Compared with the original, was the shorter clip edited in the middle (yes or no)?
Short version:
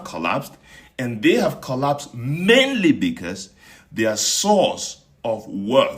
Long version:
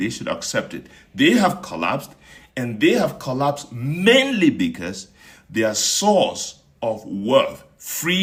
no